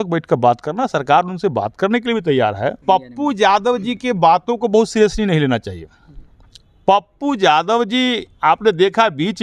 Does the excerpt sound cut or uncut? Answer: cut